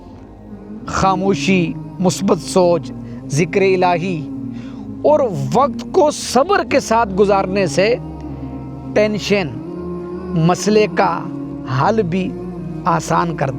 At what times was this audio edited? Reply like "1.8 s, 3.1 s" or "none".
0.9 s

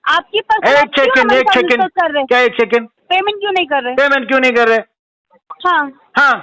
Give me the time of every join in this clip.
3.0 s

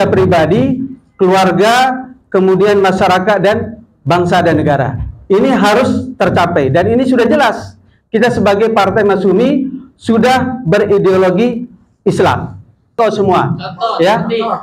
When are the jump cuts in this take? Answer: 13.0 s

